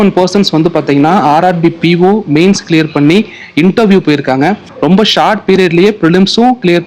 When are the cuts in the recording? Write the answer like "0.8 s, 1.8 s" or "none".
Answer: 4.7 s